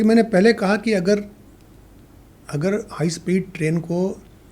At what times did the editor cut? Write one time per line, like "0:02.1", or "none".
none